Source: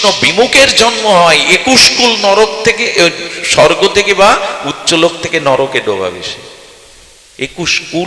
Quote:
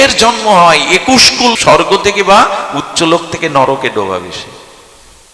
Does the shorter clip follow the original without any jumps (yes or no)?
no